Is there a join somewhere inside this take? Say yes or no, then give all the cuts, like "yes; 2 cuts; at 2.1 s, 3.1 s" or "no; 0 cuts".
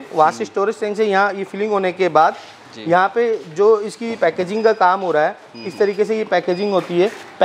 no; 0 cuts